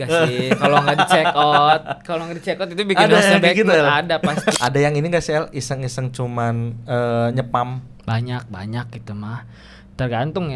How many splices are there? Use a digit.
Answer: 1